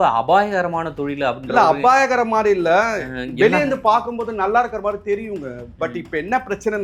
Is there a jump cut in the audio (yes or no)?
no